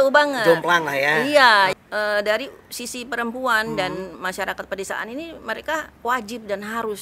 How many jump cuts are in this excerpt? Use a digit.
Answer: 1